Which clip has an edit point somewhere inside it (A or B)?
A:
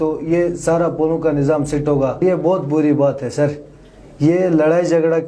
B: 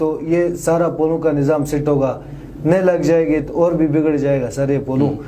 A